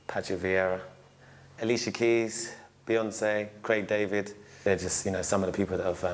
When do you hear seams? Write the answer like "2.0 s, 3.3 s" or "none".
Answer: 4.5 s